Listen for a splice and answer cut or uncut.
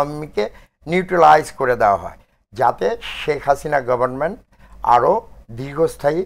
uncut